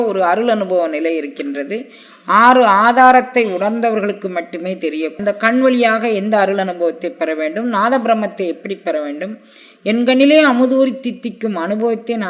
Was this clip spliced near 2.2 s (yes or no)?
no